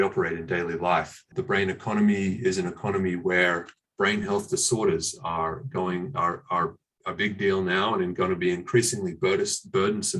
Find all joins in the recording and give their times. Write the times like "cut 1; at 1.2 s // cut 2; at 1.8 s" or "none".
cut 1; at 1.2 s